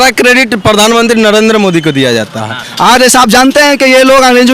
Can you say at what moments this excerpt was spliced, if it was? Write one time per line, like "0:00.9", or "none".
0:02.7

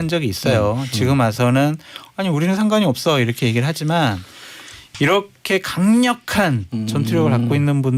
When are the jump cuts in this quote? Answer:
0:04.8

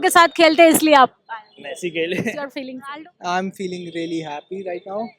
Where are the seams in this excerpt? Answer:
0:02.7

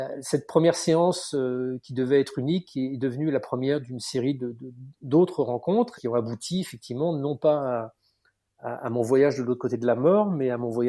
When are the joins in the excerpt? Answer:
0:05.9

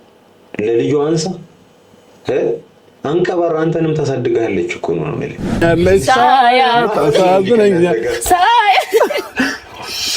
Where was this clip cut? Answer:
0:05.6

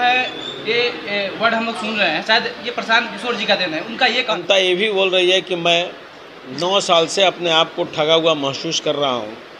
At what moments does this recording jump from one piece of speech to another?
0:04.4

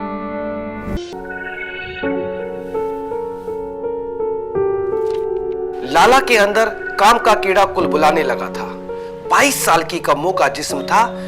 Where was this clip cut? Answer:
0:01.0

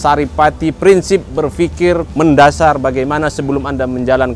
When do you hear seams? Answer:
0:02.1

